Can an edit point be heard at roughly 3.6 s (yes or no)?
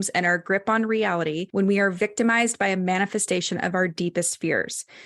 no